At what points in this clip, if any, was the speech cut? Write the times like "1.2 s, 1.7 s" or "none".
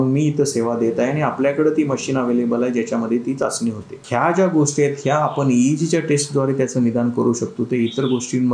3.9 s